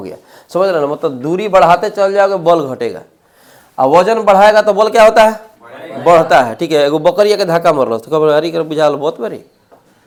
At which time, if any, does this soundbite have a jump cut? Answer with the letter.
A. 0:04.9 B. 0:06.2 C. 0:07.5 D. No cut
D